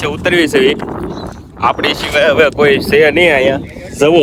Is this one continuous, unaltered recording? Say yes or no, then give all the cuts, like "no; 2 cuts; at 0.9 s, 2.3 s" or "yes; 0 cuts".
yes; 0 cuts